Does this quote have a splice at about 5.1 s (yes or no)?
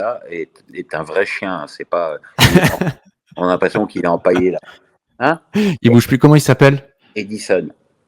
no